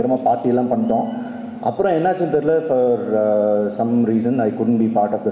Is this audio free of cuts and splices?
yes; 0 cuts

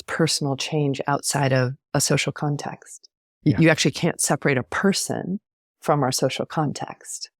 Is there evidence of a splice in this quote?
yes; 1 cut; at 1.8 s

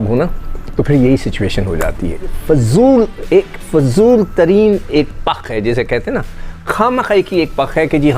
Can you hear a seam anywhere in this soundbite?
yes; 1 cut; at 2.4 s

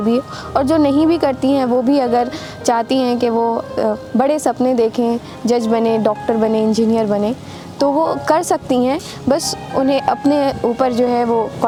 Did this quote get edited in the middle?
no; 0 cuts

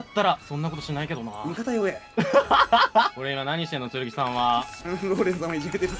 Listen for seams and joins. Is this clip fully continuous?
no; 2 cuts; at 3.2 s, 4.8 s

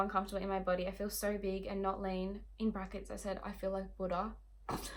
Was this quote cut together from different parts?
no; 0 cuts

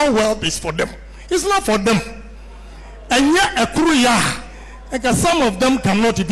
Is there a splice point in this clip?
no; 0 cuts

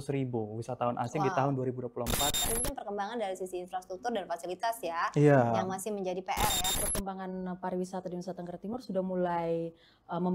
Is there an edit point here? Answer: yes; 2 cuts; at 2.4 s, 6.7 s

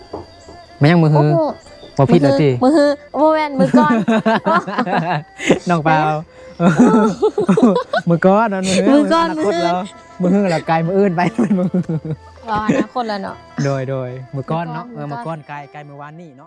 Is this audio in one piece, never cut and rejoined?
yes; 0 cuts

